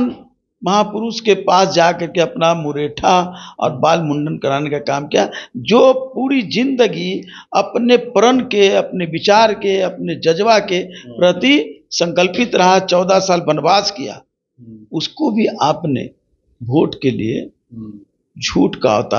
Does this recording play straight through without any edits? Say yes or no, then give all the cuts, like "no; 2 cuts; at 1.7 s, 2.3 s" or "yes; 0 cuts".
yes; 0 cuts